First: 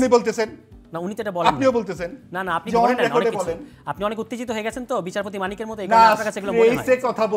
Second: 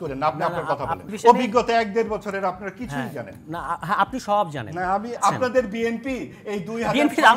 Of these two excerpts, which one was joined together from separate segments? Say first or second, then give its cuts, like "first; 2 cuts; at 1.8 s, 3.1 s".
second; 2 cuts; at 1.1 s, 5.2 s